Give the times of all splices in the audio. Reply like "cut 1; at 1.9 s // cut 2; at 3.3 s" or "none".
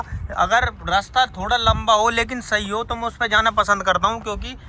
none